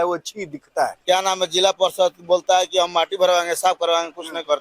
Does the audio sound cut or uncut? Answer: cut